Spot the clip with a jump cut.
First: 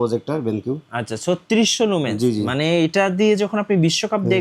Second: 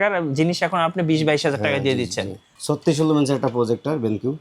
second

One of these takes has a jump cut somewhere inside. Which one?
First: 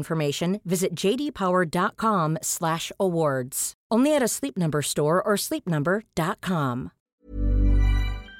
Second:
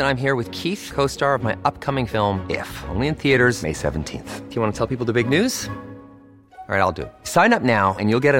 first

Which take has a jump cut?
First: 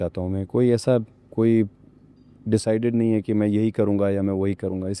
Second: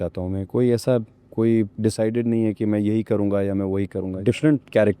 second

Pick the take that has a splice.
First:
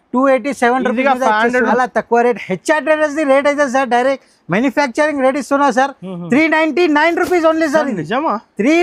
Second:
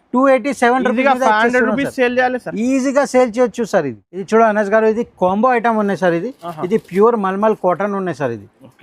first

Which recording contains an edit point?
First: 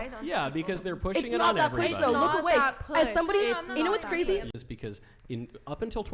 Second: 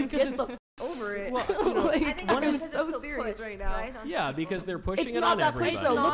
first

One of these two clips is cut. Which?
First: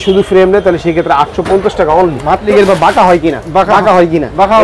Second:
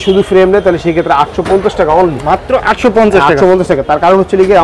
first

